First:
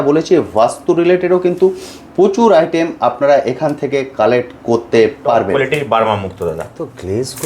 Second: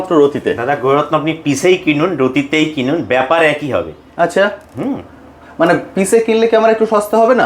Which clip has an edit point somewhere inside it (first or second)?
first